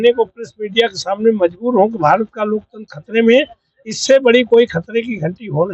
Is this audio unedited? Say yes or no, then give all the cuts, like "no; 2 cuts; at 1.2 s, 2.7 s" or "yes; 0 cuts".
yes; 0 cuts